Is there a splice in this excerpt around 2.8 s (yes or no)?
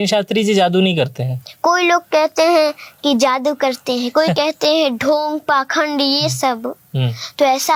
no